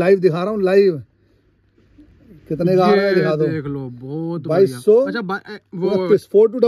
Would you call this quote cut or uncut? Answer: uncut